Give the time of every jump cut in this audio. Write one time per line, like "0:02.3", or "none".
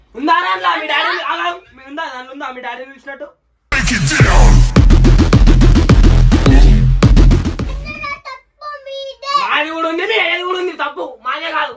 none